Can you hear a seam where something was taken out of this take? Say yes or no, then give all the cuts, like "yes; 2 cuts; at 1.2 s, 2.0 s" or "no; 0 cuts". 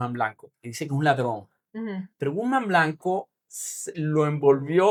no; 0 cuts